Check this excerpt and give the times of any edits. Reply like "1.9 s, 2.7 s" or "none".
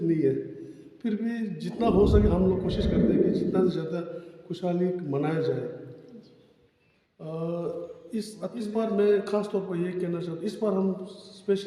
8.7 s